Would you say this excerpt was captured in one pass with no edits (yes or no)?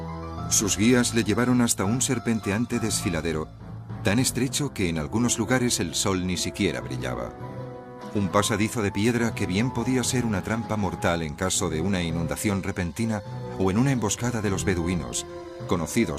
no